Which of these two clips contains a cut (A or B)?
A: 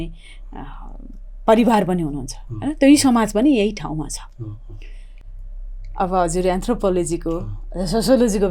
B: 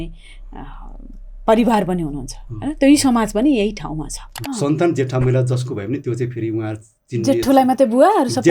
B